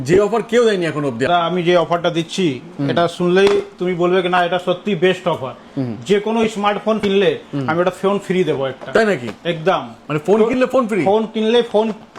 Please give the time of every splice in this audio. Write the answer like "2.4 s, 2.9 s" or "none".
1.3 s, 7.0 s

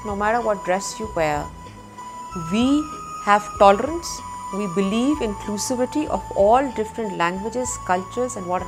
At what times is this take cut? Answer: none

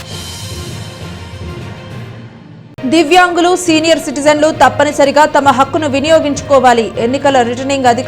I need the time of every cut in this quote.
2.2 s

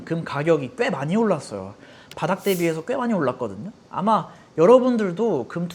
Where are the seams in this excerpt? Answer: none

